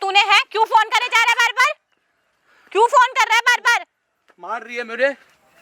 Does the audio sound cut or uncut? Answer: uncut